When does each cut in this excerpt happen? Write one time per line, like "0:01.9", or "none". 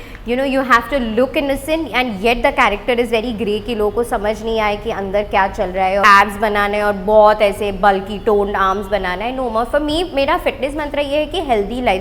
0:06.0